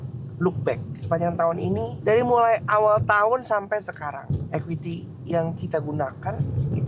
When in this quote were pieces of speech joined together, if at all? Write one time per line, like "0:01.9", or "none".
0:00.9
0:01.9
0:04.2